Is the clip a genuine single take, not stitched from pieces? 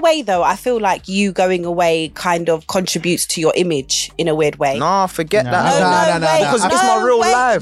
yes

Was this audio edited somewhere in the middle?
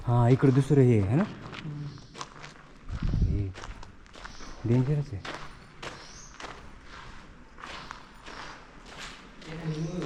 no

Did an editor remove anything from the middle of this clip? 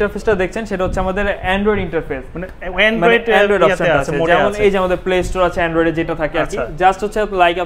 no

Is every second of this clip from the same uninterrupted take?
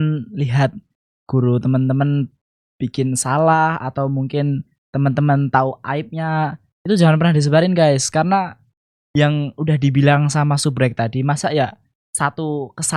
yes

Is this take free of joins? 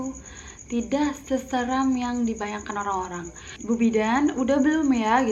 no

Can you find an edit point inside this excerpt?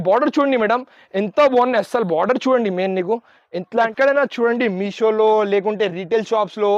yes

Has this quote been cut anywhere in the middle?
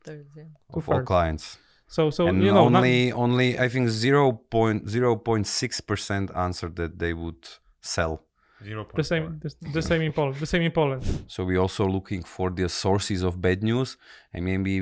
yes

